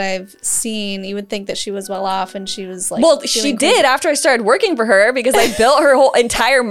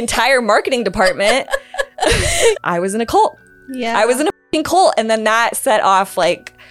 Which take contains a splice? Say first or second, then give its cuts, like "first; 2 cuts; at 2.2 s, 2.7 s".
second; 1 cut; at 2.5 s